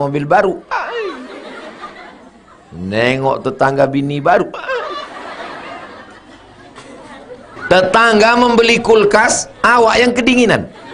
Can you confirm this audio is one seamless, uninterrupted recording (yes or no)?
no